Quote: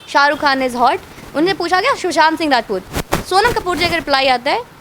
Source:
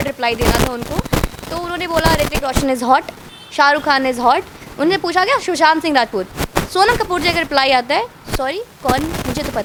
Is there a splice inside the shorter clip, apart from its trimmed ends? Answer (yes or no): no